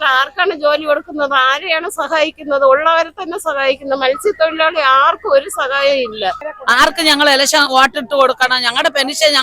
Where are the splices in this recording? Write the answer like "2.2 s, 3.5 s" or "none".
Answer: 6.5 s